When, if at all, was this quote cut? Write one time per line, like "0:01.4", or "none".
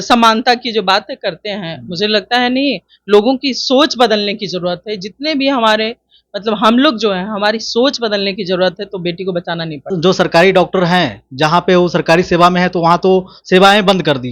0:09.8